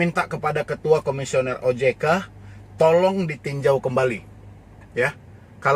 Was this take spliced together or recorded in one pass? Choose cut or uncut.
uncut